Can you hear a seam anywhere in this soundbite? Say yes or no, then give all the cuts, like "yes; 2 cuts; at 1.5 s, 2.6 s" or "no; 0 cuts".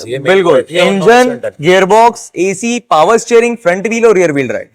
no; 0 cuts